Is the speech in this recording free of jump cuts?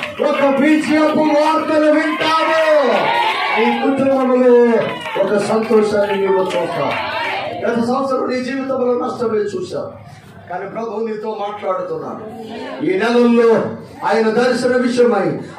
no; 4 cuts; at 3.3 s, 7.4 s, 10.1 s, 12.5 s

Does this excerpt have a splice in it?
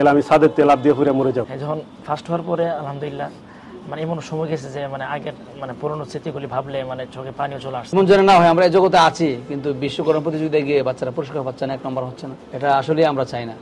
yes; 2 cuts; at 1.4 s, 7.9 s

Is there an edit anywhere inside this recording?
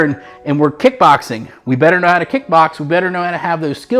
no; 0 cuts

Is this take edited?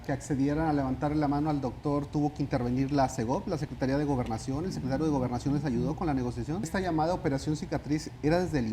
yes; 1 cut; at 6.7 s

